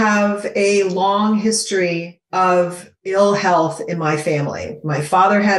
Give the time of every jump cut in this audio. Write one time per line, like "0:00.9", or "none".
0:02.2
0:03.1